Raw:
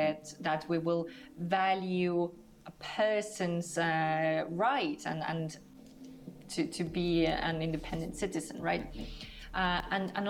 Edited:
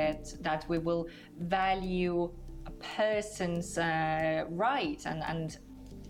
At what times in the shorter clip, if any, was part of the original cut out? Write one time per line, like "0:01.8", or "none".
none